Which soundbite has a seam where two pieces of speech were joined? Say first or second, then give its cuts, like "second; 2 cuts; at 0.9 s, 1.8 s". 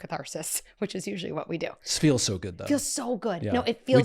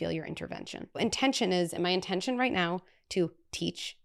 second; 1 cut; at 1.0 s